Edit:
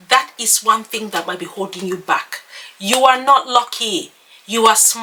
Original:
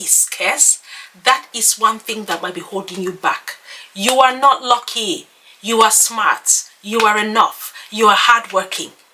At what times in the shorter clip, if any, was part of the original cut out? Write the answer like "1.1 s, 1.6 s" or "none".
none